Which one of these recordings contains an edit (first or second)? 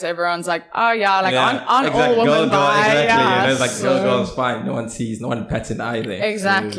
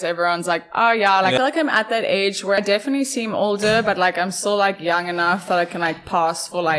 second